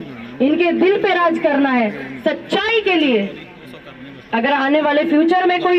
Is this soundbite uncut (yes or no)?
yes